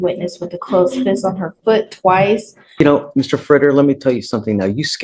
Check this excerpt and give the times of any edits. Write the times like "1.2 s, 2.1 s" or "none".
2.8 s

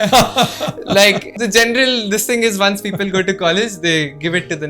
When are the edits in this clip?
1.3 s

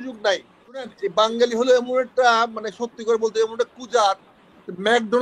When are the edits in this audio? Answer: 1.0 s

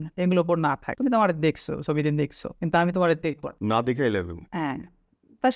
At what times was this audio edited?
0.9 s, 2.4 s, 3.5 s, 4.4 s

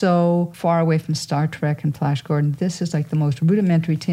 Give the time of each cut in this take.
none

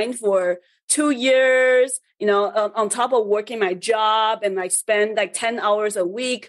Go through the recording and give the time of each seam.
none

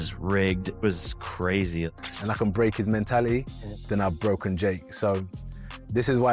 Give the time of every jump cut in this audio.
1.9 s

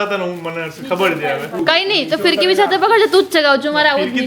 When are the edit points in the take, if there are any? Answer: 1.6 s

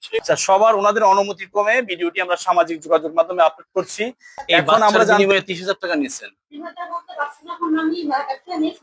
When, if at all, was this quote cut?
5.2 s

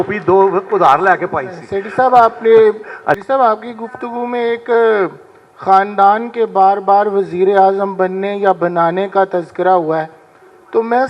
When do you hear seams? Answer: 3.2 s

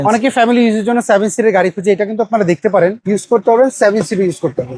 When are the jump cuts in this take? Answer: 3.0 s

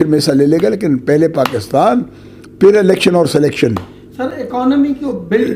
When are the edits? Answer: none

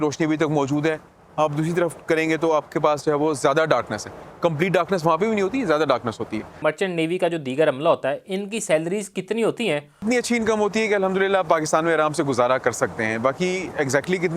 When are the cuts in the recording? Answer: 6.6 s, 10.0 s

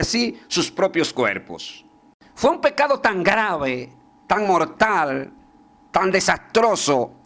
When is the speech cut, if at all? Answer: 2.2 s

